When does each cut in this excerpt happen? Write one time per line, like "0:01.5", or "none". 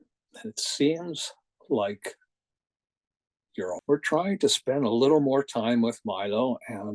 0:03.8